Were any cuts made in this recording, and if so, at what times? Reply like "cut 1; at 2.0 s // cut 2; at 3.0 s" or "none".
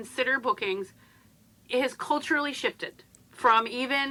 none